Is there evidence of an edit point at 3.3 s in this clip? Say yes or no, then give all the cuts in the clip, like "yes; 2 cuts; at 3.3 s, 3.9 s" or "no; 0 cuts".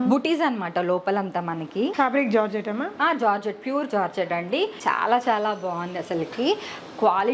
no; 2 cuts; at 1.9 s, 4.8 s